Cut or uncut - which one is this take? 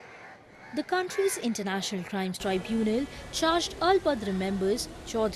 cut